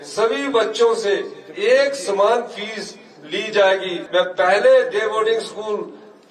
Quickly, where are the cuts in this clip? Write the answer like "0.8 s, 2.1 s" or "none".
4.0 s